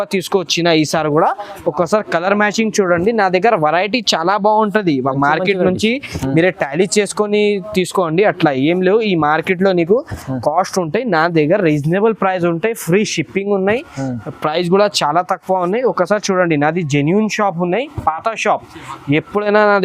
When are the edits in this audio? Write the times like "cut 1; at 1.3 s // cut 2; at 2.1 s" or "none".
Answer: none